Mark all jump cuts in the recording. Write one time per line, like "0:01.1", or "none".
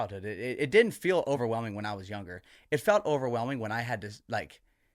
0:01.4